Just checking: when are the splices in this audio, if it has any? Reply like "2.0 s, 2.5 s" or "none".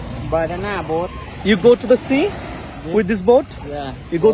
none